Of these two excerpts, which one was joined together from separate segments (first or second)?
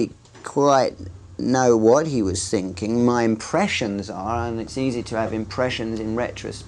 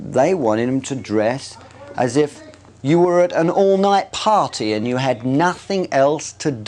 second